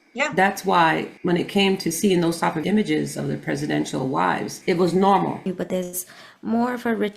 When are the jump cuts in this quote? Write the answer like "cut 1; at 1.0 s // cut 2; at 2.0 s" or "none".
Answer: cut 1; at 1.1 s // cut 2; at 2.6 s // cut 3; at 4.5 s // cut 4; at 5.4 s